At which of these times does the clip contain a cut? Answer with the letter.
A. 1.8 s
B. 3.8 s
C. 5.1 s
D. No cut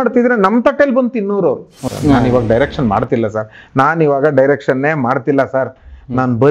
A